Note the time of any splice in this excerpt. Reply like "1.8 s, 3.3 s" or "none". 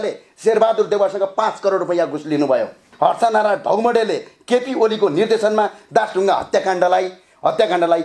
2.9 s